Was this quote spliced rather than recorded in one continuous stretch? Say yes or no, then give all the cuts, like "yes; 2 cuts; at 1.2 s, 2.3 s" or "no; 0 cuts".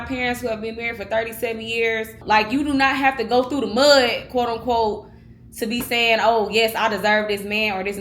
yes; 1 cut; at 2.2 s